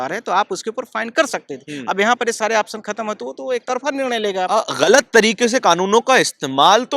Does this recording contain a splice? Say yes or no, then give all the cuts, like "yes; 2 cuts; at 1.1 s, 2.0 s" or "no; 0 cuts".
yes; 1 cut; at 4.7 s